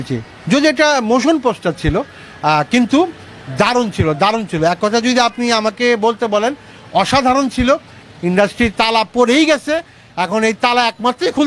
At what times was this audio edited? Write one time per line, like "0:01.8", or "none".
0:08.1